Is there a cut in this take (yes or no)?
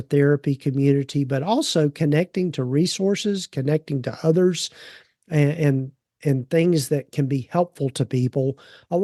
no